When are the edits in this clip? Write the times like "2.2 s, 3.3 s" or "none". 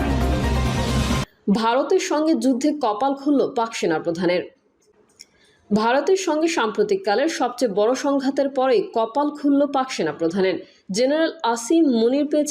1.2 s